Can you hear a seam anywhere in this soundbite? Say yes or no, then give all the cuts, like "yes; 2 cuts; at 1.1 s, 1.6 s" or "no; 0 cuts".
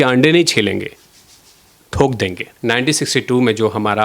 yes; 1 cut; at 2.5 s